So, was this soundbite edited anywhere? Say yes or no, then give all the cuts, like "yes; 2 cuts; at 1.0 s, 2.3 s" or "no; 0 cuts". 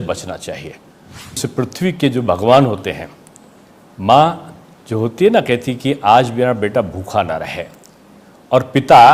yes; 1 cut; at 1.4 s